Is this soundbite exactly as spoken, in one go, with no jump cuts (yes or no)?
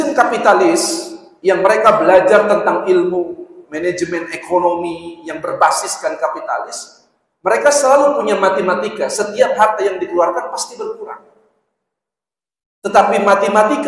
yes